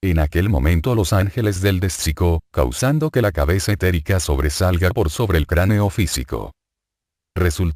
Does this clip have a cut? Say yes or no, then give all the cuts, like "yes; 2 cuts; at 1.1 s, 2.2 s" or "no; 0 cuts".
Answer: no; 0 cuts